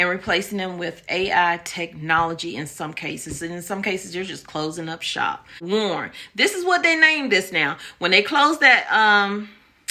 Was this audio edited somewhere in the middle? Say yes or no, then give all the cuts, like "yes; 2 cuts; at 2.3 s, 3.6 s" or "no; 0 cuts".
yes; 1 cut; at 5.6 s